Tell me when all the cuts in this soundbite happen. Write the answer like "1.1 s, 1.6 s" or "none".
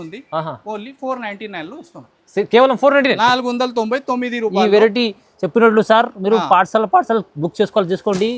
none